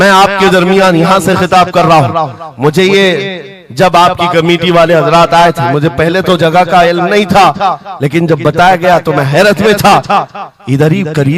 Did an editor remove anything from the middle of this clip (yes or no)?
no